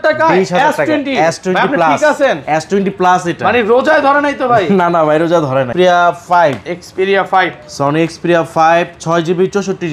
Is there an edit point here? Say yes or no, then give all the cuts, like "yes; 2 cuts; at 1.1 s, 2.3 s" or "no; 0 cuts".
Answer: yes; 1 cut; at 5.7 s